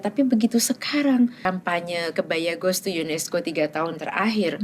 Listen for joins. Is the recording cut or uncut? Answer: cut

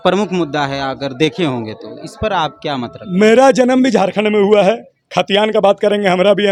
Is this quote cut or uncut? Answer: uncut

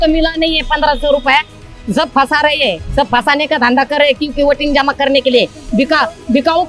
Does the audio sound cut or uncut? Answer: uncut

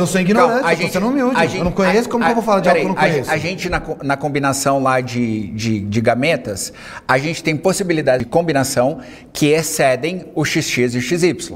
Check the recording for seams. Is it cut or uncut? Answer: cut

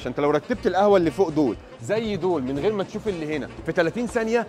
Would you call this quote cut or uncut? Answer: uncut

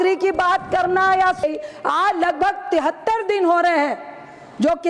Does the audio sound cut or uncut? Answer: cut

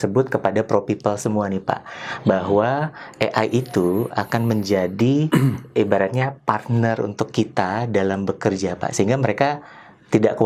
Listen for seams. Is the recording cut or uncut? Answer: uncut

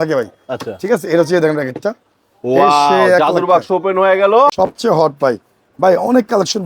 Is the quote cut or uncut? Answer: cut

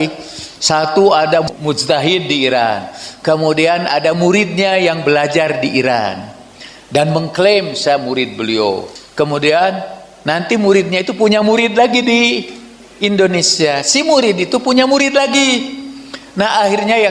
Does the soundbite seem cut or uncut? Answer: uncut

